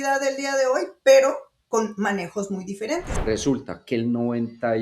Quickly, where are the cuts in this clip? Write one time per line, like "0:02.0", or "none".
0:03.1